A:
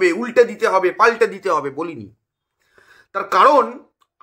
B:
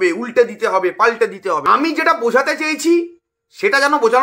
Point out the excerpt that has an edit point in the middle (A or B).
B